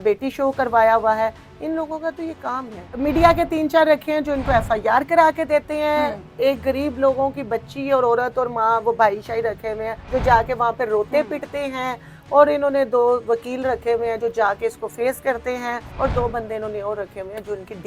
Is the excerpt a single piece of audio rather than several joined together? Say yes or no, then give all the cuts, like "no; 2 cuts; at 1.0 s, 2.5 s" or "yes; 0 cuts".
no; 3 cuts; at 3.0 s, 9.9 s, 15.9 s